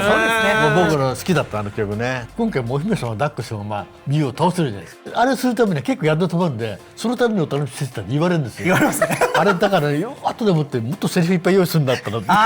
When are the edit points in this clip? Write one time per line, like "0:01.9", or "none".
0:02.2
0:05.0